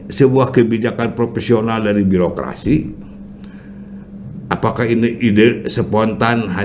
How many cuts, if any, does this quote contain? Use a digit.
0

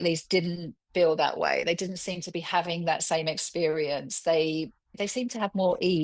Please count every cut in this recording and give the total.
1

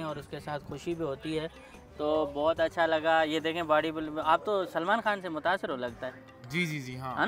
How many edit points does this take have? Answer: 1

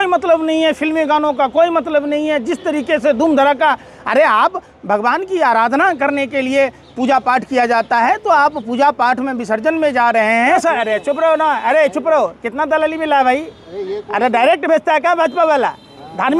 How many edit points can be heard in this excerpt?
1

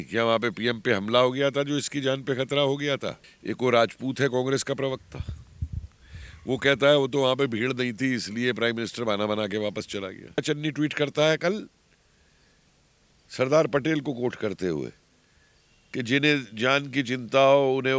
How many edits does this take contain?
2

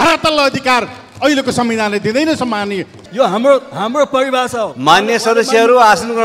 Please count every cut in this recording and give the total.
1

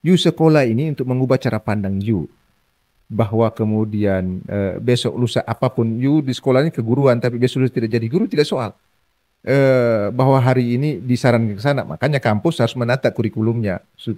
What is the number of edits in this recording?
0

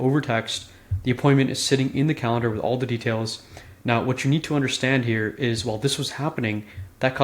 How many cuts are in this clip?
0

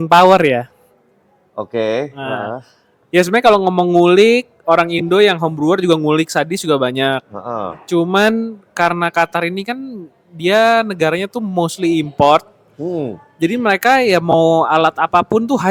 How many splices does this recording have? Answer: 0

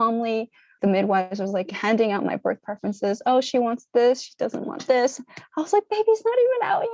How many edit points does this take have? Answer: 0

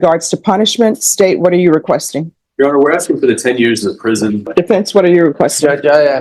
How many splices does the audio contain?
1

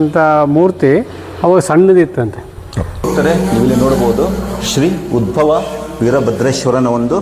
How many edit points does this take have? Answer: 1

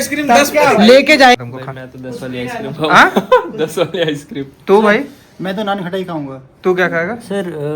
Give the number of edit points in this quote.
1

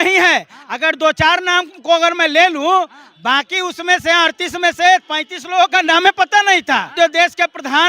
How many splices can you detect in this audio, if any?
1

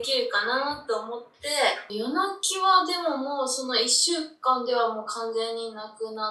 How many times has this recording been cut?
1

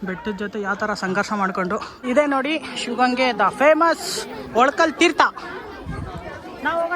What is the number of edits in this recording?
1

